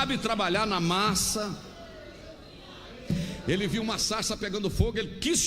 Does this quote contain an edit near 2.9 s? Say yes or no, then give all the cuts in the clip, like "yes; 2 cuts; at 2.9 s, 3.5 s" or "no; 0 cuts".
yes; 1 cut; at 2.9 s